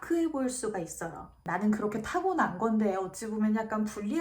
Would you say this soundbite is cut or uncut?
cut